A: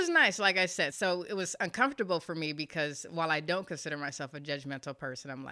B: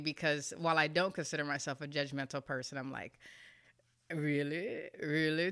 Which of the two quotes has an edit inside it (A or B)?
A